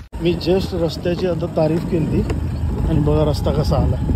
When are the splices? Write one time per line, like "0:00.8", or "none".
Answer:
none